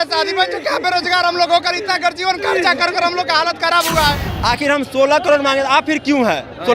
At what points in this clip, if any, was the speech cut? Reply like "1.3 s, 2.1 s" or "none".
4.3 s